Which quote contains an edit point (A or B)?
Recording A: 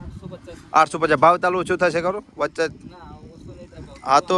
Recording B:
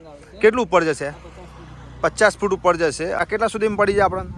B